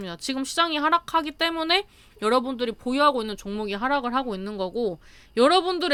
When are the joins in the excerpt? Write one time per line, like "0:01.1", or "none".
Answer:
none